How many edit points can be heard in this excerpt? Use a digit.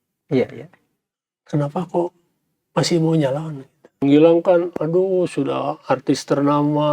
1